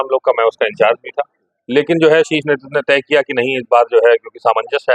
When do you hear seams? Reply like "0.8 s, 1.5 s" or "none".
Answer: none

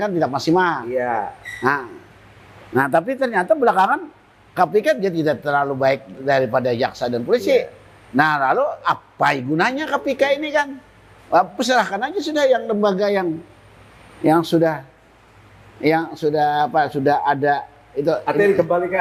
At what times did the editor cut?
none

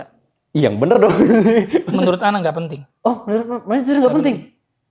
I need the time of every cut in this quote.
none

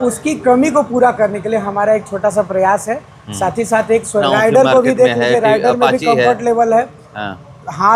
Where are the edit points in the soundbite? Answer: 4.2 s

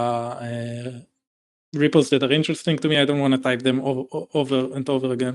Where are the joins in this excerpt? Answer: none

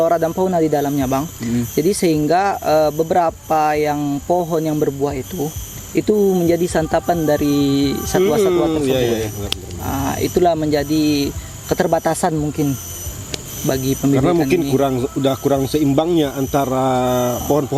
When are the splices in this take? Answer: none

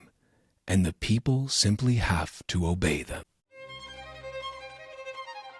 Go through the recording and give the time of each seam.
3.7 s

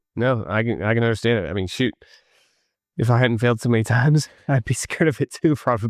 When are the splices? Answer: none

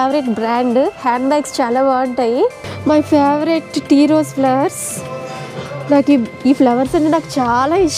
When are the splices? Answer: 2.7 s

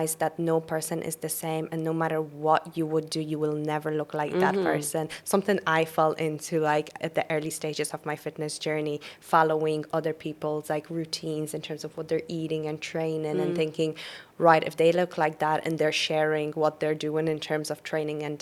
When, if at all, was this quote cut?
none

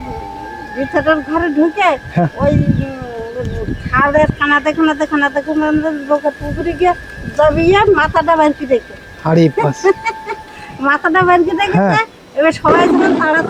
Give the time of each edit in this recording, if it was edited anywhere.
none

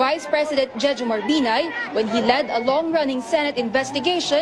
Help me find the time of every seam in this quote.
1.4 s

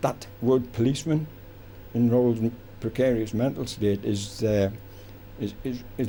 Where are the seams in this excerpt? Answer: none

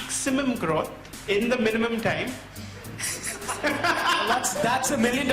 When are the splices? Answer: 1.1 s

